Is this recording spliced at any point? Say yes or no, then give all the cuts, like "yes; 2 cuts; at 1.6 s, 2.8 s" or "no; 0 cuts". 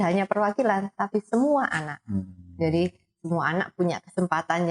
no; 0 cuts